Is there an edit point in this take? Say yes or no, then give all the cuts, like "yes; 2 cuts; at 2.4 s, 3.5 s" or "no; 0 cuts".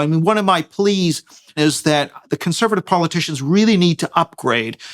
yes; 1 cut; at 1.6 s